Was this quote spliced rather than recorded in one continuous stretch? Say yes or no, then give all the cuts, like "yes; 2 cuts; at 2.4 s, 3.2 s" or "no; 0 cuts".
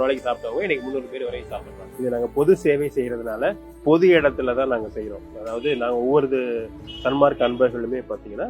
yes; 1 cut; at 1.5 s